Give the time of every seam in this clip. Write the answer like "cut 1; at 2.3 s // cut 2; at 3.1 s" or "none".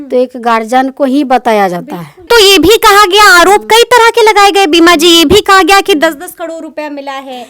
cut 1; at 2.2 s